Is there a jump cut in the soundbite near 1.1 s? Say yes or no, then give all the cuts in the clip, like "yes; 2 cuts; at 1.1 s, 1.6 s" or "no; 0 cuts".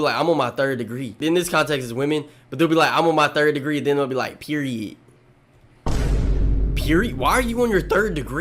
yes; 1 cut; at 1.1 s